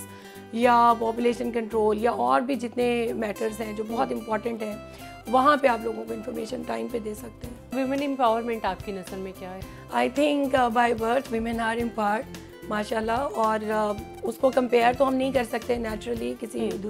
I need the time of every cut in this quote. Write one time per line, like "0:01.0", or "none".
none

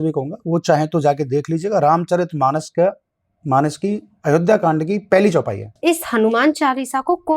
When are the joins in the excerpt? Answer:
0:05.7

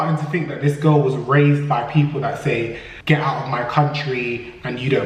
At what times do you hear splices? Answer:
none

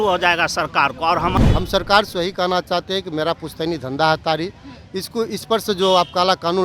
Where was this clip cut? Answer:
0:01.4

